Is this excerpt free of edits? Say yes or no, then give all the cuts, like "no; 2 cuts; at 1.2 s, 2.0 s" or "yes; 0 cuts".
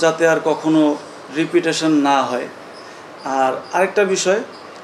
yes; 0 cuts